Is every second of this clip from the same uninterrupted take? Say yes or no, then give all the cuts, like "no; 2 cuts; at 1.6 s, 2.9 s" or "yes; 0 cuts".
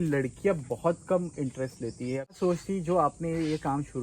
no; 1 cut; at 2.3 s